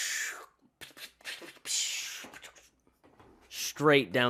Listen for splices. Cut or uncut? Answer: uncut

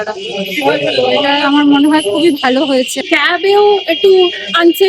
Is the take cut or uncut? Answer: cut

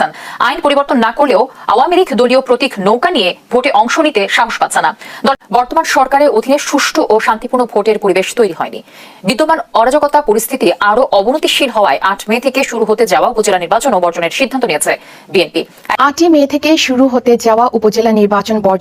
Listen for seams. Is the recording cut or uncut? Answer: cut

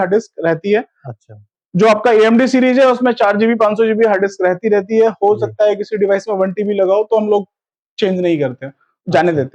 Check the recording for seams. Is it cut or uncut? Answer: uncut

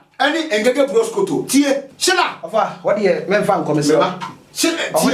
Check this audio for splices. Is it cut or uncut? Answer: cut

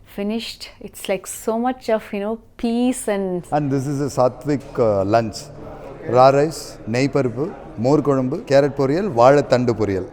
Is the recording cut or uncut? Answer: cut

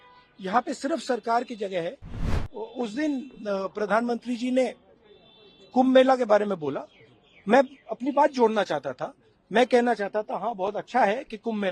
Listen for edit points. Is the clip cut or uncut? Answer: cut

